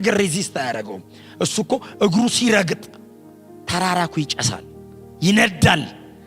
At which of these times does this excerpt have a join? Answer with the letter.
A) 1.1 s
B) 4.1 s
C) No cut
C